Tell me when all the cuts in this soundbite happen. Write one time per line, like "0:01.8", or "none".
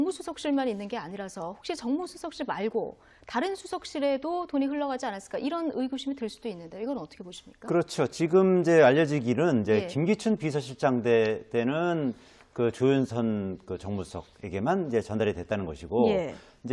none